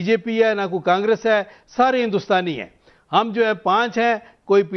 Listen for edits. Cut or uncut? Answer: uncut